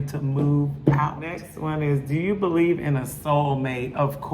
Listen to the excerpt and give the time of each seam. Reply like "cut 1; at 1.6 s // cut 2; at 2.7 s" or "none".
cut 1; at 1.5 s

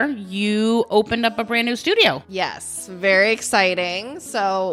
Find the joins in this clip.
cut 1; at 2.3 s

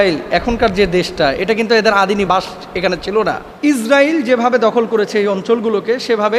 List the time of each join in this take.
cut 1; at 3.5 s

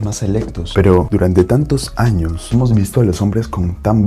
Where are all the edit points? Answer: cut 1; at 0.9 s // cut 2; at 2.4 s

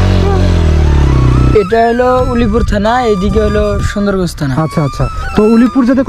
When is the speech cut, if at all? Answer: cut 1; at 1.5 s

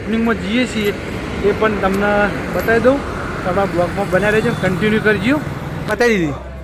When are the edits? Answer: cut 1; at 5.6 s

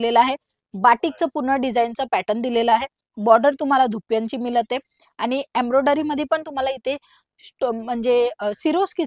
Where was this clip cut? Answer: none

